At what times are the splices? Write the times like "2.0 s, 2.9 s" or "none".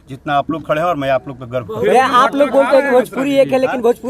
none